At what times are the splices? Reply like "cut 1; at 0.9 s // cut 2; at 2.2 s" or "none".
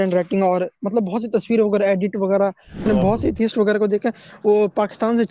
cut 1; at 2.9 s